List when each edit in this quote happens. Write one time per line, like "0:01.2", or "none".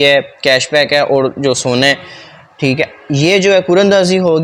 none